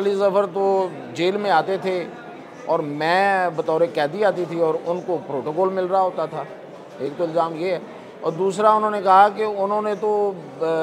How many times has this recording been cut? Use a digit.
0